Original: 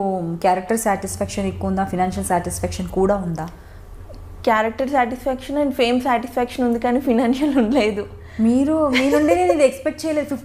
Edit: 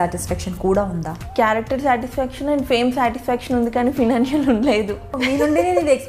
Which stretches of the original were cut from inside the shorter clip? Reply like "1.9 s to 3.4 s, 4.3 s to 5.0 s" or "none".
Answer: 3.5 s to 4.2 s, 8.3 s to 8.9 s